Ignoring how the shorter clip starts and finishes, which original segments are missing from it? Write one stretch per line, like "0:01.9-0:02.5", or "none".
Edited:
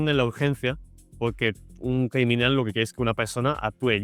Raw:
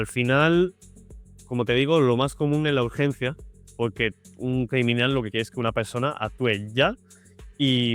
none